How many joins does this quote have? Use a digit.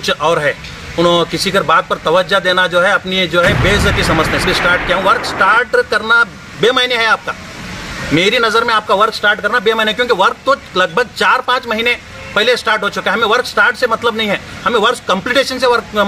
1